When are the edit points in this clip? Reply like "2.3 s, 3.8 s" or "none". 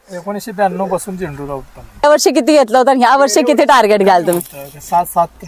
2.0 s